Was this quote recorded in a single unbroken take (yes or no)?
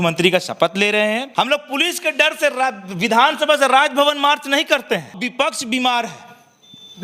no